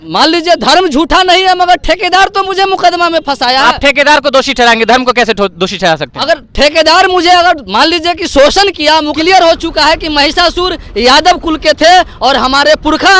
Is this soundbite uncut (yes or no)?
no